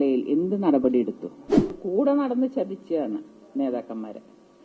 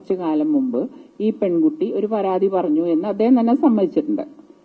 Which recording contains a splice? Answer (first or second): first